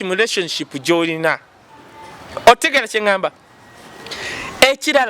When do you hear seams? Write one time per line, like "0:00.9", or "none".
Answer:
none